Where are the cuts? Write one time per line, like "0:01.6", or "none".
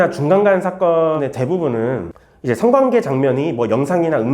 0:01.2